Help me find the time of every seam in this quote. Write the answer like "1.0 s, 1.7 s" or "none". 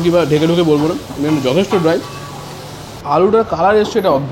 2.9 s